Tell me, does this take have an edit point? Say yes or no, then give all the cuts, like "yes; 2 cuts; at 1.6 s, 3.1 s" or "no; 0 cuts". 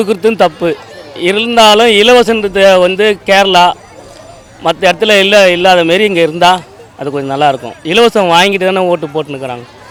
no; 0 cuts